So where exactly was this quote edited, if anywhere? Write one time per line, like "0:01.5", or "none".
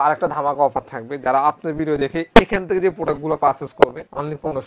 none